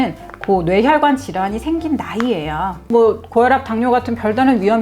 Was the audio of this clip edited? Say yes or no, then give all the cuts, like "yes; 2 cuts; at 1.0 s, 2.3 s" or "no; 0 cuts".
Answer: yes; 1 cut; at 2.8 s